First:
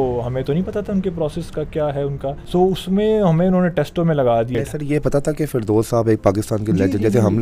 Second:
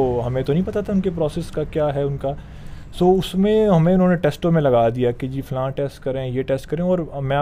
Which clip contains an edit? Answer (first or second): first